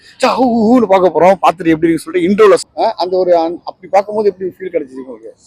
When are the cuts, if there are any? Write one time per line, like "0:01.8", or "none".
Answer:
0:02.7